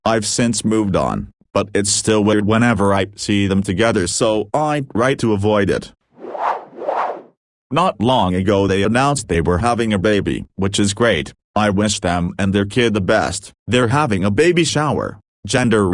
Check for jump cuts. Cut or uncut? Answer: uncut